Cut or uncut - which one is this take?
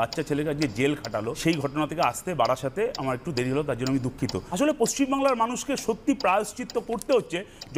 cut